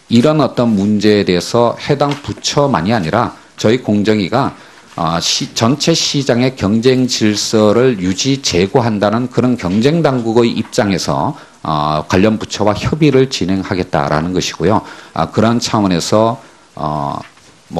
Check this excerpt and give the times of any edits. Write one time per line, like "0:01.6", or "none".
0:12.5